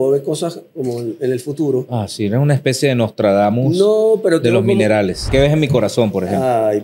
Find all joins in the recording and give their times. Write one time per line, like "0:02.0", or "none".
0:05.3